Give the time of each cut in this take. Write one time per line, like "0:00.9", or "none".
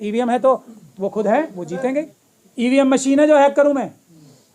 0:02.2